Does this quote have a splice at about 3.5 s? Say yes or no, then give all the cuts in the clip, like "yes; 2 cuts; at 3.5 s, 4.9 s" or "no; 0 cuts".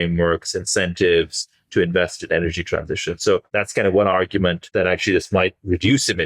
yes; 2 cuts; at 3.5 s, 4.6 s